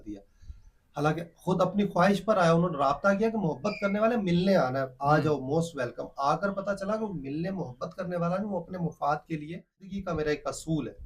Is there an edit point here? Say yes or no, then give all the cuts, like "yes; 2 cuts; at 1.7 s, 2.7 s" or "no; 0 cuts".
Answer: yes; 1 cut; at 9.9 s